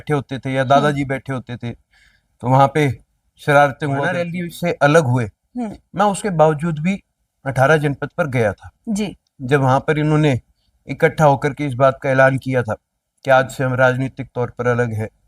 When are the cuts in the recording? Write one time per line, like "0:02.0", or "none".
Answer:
0:04.3